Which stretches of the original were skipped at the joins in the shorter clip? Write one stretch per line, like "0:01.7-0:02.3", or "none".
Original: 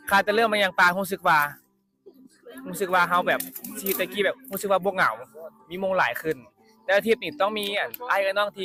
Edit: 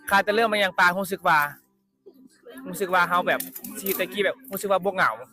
none